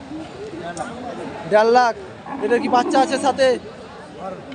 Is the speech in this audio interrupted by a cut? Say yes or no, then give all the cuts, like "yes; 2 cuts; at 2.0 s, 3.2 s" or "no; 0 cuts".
no; 0 cuts